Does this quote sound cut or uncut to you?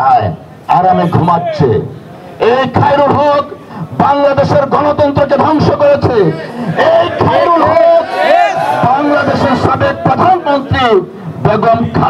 uncut